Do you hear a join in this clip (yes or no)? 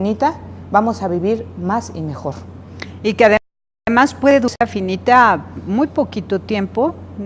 no